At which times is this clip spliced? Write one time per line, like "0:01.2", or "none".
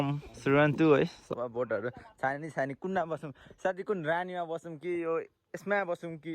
0:01.4